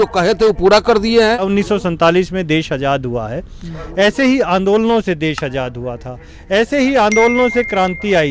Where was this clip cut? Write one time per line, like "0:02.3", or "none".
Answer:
0:01.5